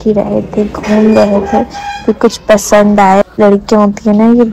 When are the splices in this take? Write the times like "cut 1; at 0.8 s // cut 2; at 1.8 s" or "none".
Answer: cut 1; at 3.3 s